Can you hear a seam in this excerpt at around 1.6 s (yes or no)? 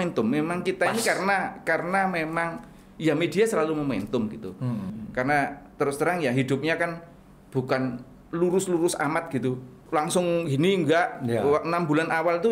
no